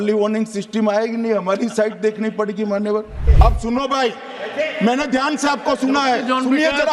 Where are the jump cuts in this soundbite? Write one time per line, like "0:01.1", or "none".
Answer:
0:03.2